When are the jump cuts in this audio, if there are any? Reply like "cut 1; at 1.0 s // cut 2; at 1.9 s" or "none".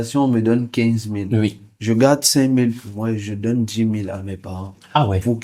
none